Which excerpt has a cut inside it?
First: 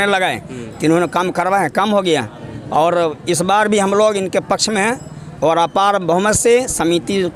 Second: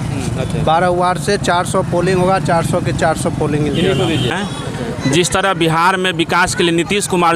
second; 1 cut; at 4.3 s

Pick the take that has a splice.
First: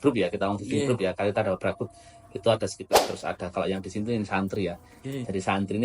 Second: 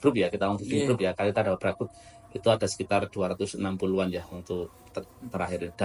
first; 1 cut; at 2.8 s

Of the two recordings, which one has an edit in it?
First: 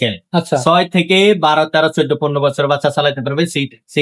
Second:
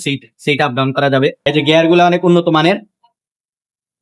second; 1 cut; at 1.5 s

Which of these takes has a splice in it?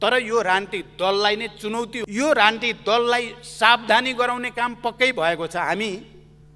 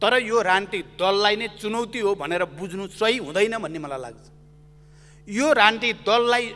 first; 1 cut; at 1.9 s

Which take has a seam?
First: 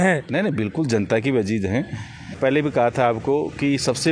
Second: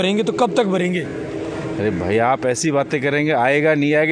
first; 1 cut; at 2.4 s

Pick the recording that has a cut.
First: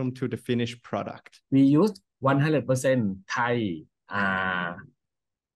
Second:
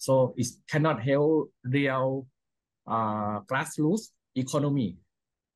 first; 1 cut; at 1.4 s

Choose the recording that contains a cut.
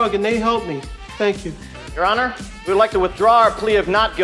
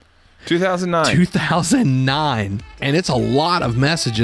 second; 1 cut; at 2.8 s

